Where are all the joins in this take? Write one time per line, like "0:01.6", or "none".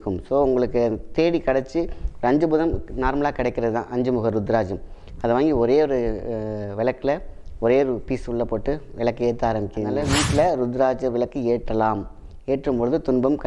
0:10.0

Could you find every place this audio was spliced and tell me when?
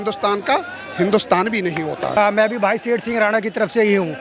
0:02.2

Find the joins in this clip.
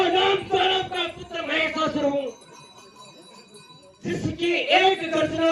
none

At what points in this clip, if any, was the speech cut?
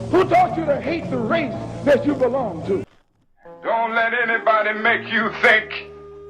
0:03.0

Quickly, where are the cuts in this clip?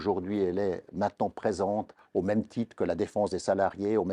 0:02.0

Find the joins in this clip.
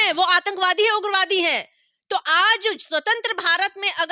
none

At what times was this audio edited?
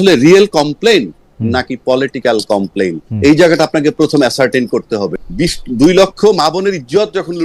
0:05.2

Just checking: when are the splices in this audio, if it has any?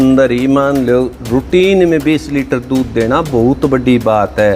none

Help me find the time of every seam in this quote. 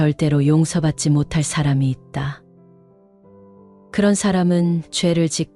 none

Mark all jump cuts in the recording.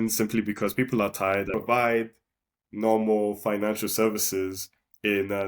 0:01.5

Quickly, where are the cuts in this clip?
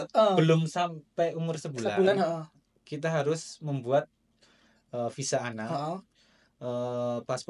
none

